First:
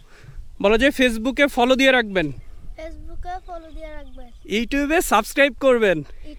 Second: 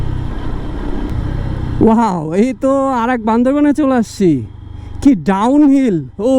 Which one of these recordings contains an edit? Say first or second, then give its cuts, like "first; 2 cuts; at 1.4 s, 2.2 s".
second; 1 cut; at 1.1 s